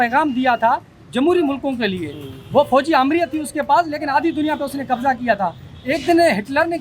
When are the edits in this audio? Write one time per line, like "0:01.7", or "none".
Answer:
none